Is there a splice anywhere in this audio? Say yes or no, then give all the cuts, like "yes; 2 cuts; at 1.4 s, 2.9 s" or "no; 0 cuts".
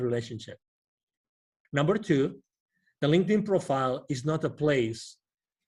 yes; 1 cut; at 1.5 s